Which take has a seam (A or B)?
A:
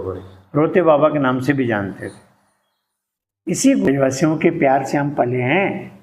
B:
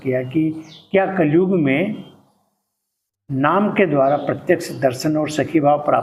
A